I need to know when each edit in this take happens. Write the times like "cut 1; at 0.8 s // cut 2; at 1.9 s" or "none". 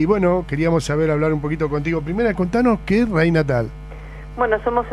cut 1; at 2.3 s